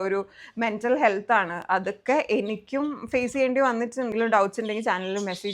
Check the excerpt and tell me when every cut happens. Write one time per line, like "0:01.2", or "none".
0:04.1